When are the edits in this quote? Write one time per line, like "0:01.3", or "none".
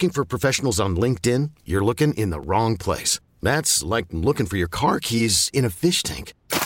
none